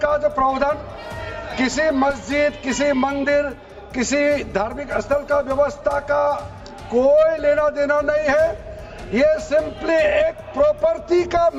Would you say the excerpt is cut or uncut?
uncut